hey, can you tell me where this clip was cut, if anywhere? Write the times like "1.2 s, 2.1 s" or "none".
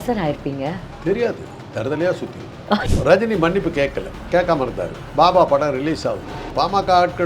2.9 s, 4.1 s, 5.0 s, 6.3 s